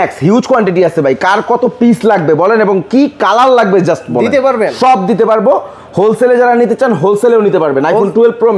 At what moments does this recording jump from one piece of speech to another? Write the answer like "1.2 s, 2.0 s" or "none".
none